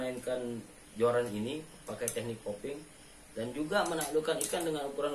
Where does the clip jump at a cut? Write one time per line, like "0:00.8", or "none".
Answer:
none